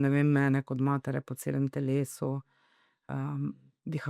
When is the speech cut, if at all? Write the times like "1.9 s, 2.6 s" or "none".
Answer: none